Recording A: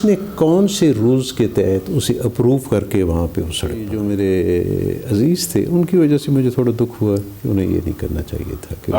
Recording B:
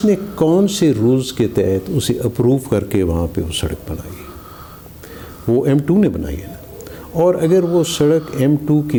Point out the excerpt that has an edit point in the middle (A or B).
A